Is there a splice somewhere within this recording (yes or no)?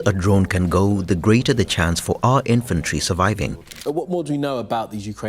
yes